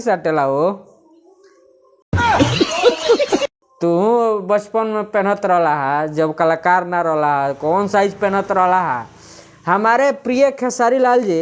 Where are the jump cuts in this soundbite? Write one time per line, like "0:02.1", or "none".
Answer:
0:02.0
0:03.6